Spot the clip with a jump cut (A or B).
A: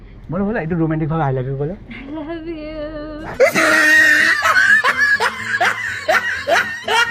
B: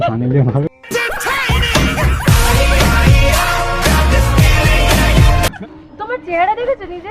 B